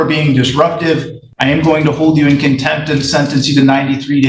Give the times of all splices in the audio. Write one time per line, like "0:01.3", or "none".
0:01.2